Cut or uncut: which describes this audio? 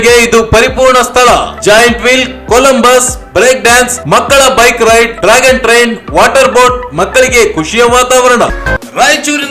cut